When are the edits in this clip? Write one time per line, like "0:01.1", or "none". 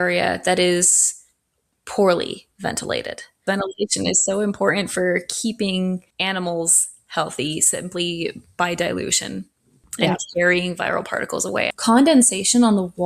0:03.4
0:06.1
0:11.7